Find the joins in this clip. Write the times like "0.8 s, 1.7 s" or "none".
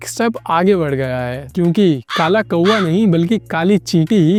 none